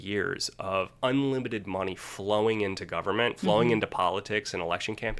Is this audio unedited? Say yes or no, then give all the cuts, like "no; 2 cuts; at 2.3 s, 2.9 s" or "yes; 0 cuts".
yes; 0 cuts